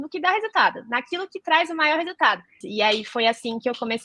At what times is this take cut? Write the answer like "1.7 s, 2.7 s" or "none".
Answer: 2.6 s